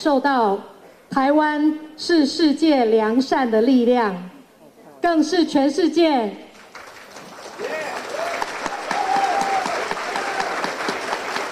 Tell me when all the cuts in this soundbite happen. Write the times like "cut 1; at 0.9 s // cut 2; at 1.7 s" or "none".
none